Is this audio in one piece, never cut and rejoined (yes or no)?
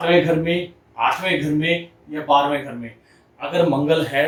yes